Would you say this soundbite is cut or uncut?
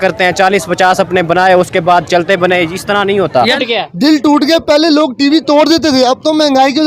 cut